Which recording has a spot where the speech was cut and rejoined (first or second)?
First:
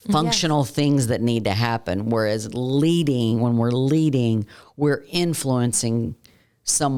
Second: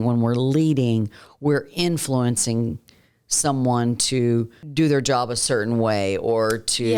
second